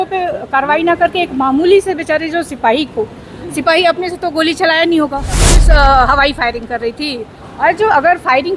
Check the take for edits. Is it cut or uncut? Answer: cut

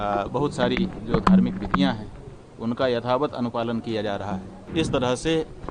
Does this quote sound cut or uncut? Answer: cut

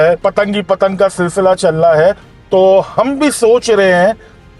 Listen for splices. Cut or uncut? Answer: uncut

